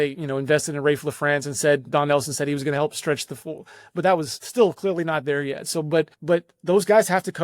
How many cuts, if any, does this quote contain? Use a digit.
2